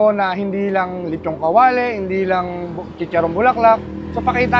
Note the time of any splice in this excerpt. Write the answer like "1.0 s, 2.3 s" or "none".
none